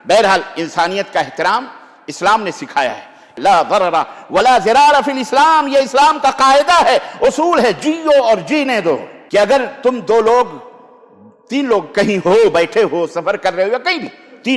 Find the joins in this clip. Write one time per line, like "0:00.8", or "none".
0:03.3
0:09.1

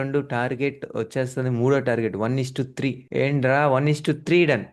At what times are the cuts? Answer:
none

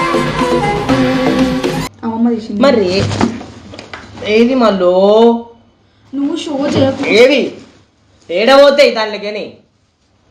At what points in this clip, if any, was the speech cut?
0:02.0

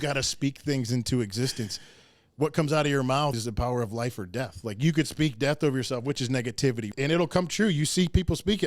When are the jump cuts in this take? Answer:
0:03.4
0:06.9

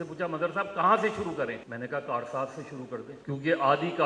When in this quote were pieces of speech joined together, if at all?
0:01.7
0:03.1

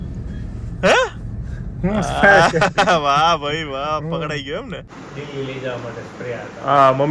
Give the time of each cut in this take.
0:04.9

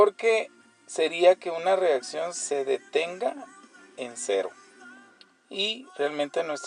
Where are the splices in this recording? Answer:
none

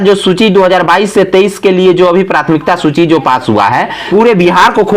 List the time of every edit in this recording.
0:04.1

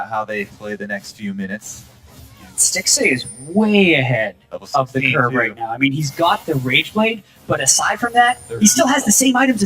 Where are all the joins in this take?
0:04.6

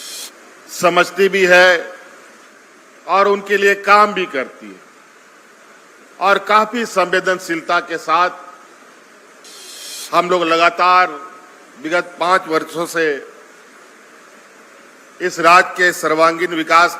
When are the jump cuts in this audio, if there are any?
0:09.4

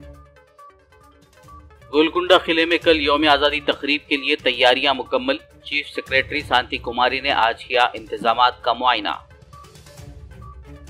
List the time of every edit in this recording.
0:00.9
0:01.5

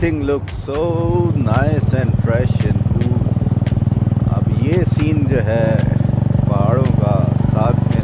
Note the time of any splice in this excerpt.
none

